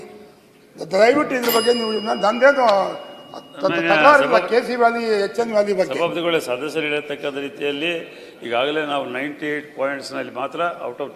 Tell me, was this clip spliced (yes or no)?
no